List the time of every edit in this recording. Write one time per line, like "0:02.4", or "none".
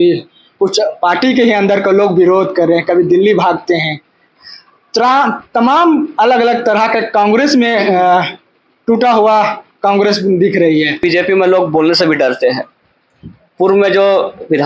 0:11.0